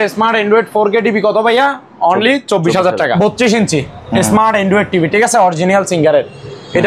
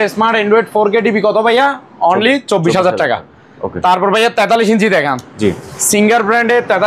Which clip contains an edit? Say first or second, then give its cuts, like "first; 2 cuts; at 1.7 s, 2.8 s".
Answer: first; 1 cut; at 3.2 s